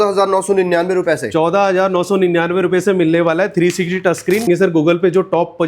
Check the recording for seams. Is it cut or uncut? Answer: cut